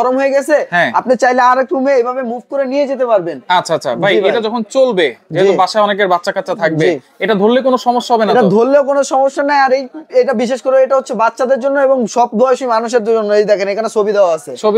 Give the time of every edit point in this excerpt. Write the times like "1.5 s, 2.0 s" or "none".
none